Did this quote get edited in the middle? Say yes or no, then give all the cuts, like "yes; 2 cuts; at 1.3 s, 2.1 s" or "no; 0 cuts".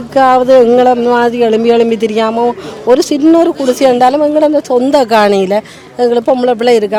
no; 0 cuts